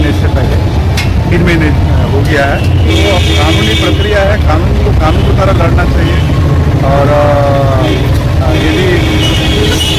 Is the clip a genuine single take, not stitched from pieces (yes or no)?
yes